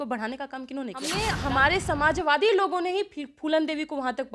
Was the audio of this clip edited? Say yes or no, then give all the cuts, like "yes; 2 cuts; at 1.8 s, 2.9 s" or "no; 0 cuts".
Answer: yes; 1 cut; at 1.1 s